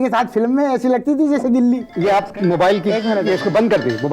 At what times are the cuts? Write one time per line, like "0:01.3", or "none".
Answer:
0:01.9